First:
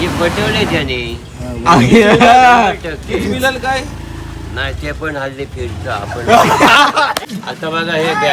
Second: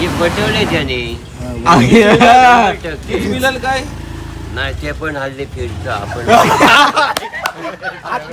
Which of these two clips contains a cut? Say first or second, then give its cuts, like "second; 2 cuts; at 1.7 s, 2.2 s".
first; 1 cut; at 7.3 s